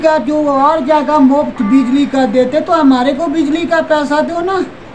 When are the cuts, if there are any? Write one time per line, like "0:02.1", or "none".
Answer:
none